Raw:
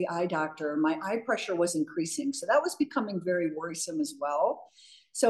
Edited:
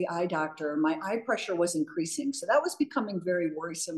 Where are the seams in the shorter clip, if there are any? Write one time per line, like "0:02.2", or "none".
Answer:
none

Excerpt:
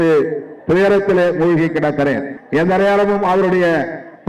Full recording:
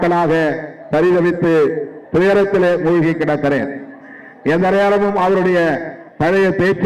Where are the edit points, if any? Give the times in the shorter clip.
0:02.3

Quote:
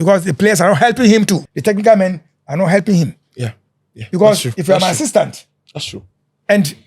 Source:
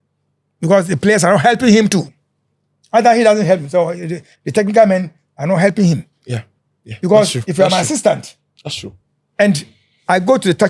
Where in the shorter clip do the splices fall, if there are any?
0:01.5

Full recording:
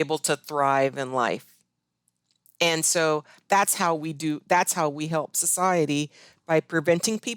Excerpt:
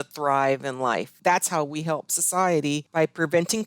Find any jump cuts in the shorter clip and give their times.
0:01.2
0:02.9

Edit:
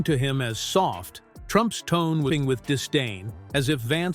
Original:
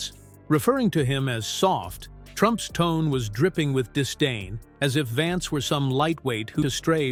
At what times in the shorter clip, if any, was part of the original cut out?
0:02.3

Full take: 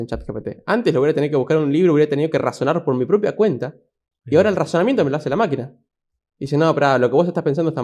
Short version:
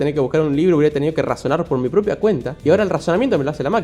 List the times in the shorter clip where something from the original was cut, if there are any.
0:02.5

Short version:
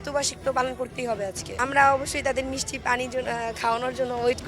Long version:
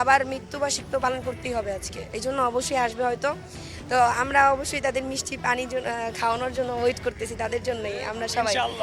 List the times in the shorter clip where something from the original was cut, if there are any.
0:01.6

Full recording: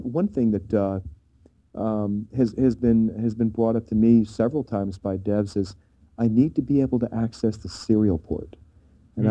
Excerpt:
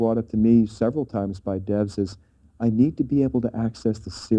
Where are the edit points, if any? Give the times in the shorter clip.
none

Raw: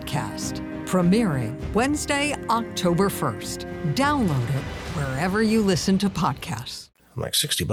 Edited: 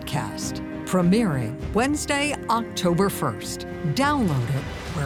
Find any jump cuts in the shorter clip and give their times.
none

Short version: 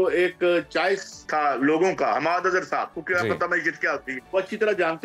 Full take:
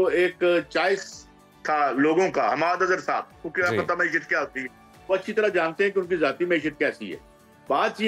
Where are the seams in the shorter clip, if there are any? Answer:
0:01.2
0:03.0
0:04.1

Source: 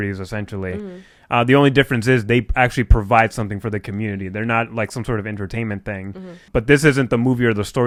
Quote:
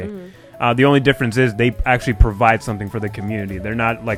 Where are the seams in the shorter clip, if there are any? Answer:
none

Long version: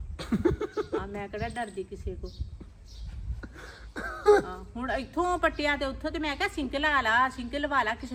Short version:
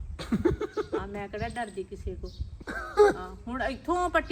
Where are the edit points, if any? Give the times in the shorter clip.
0:02.5

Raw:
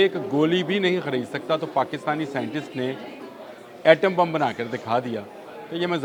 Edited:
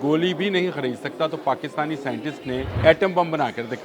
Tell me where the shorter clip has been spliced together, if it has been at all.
0:02.7

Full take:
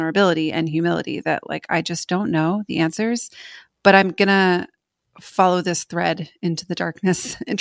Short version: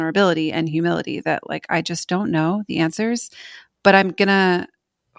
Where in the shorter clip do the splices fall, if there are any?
none

